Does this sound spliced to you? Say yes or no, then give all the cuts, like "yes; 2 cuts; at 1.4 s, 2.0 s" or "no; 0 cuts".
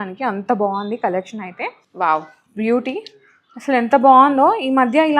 yes; 1 cut; at 1.8 s